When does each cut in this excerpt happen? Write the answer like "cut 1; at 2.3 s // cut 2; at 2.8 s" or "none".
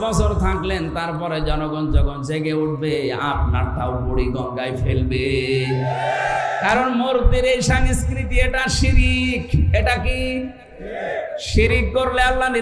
none